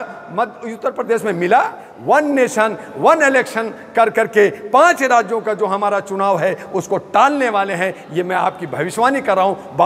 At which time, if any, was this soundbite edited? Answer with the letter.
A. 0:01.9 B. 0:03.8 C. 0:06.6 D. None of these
A